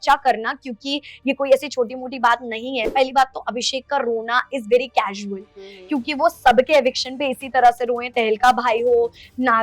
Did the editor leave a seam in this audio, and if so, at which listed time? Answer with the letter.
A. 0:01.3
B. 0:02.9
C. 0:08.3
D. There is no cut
B